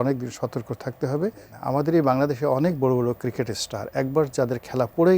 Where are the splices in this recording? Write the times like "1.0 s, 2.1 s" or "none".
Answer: 1.5 s

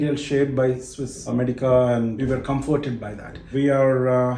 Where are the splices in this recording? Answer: 1.3 s, 2.2 s, 3.5 s

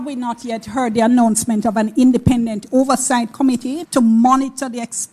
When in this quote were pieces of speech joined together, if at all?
3.8 s

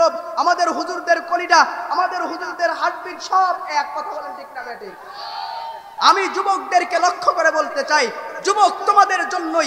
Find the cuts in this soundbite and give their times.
5.9 s

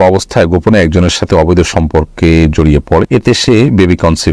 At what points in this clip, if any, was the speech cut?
3.4 s

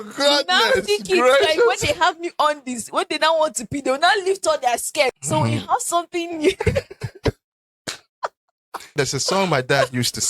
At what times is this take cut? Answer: 5.2 s, 8.9 s

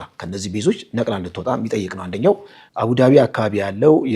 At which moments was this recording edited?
2.7 s

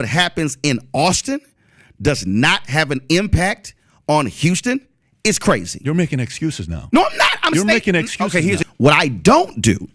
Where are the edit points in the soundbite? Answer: 8.6 s

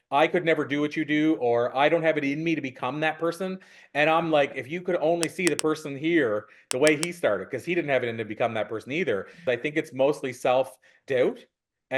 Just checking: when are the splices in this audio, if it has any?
9.4 s

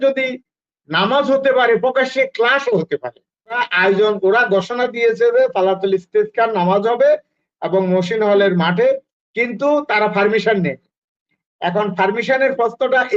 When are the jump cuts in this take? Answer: 3.7 s

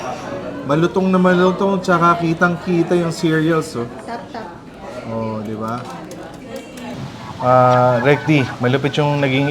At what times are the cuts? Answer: 6.9 s

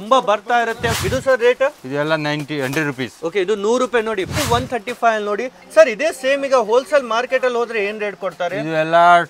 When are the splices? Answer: 1.0 s, 4.3 s

